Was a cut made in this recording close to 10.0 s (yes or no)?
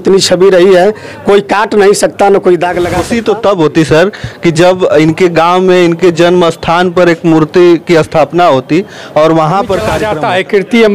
yes